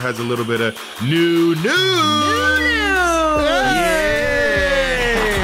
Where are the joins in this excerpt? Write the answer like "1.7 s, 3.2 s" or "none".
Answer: none